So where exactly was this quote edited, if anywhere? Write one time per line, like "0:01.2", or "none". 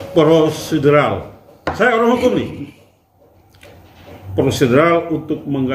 none